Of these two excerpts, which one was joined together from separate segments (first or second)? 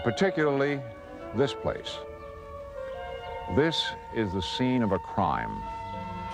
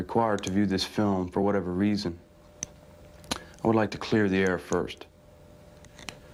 first